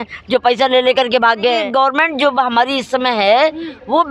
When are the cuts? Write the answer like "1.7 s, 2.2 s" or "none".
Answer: 1.7 s